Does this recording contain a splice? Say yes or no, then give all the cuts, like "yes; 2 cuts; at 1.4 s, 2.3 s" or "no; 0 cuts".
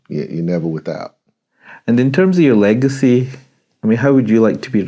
no; 0 cuts